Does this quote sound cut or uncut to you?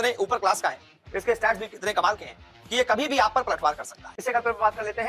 cut